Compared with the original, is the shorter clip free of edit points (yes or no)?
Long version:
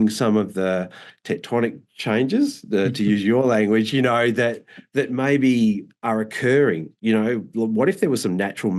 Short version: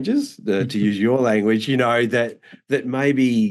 yes